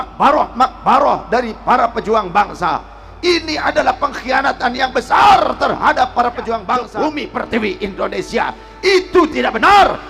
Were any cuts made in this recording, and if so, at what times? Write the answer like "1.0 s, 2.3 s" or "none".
6.8 s